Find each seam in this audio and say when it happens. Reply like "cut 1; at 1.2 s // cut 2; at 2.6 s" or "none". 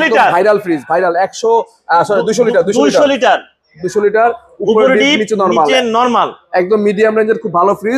none